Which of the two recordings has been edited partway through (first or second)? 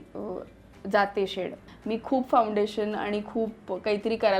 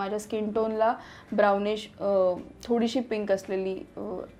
first